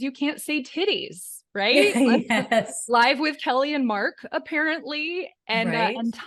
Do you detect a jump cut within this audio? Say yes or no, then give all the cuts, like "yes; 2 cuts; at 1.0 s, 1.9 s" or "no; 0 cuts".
no; 0 cuts